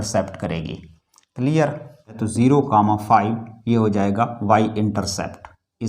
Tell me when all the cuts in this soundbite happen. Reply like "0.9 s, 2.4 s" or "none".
2.2 s